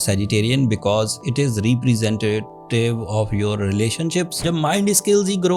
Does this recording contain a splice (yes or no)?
yes